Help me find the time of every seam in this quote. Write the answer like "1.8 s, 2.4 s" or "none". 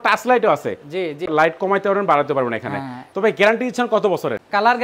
1.3 s, 3.0 s